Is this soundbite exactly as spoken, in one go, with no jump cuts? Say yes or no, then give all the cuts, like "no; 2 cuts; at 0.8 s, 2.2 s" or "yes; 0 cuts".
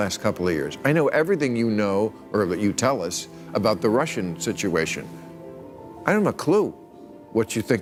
yes; 0 cuts